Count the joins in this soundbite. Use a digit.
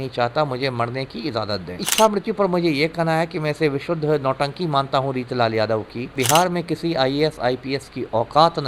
2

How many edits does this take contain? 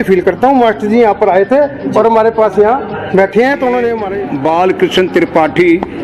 1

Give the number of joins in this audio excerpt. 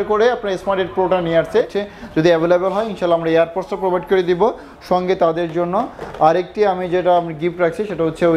1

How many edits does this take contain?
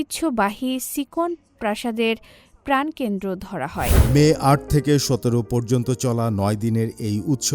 1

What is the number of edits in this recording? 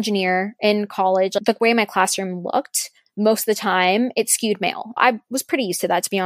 2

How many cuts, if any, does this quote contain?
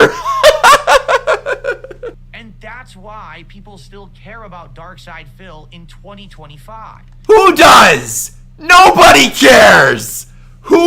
1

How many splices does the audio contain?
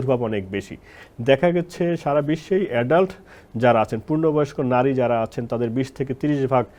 0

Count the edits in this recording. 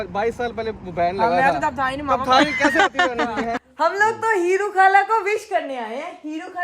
1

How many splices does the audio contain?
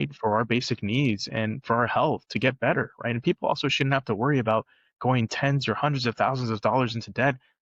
0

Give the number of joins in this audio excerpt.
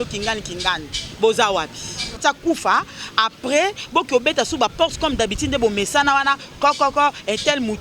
1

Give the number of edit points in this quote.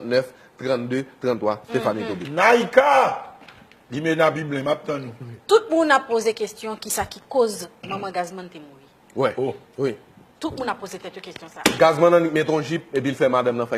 1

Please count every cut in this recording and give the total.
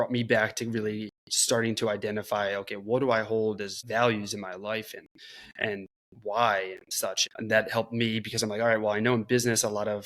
2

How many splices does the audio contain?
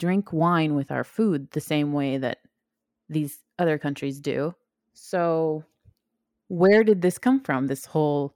1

